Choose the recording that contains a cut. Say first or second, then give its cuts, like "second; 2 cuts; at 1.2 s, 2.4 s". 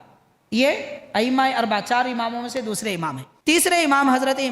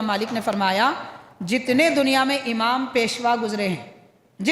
first; 1 cut; at 3.3 s